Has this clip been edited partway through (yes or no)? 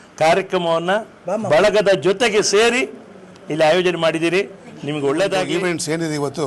yes